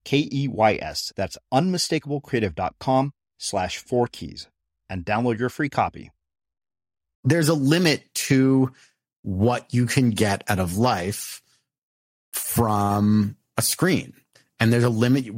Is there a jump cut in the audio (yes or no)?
yes